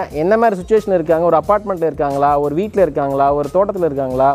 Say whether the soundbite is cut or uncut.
uncut